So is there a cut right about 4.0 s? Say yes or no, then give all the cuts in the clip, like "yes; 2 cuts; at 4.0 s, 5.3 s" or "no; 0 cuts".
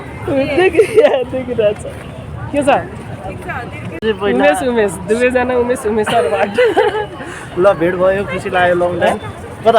yes; 1 cut; at 4.0 s